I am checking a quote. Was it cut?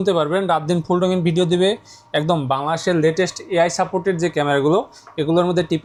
no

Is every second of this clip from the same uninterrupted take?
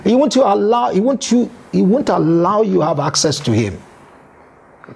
yes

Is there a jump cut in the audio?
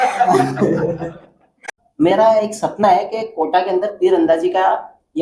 yes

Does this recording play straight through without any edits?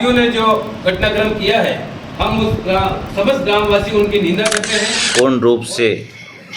no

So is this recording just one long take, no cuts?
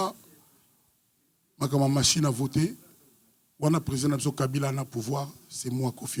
yes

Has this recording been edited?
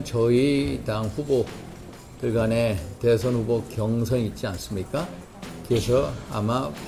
no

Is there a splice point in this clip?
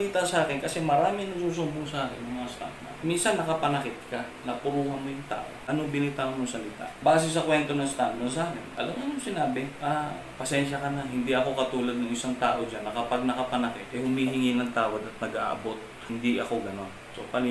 yes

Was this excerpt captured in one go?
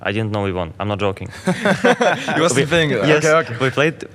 yes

